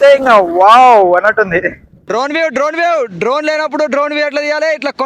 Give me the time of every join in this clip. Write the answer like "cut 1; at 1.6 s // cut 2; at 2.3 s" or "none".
cut 1; at 1.9 s